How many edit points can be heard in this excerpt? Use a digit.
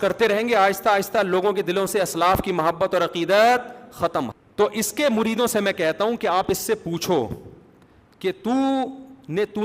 1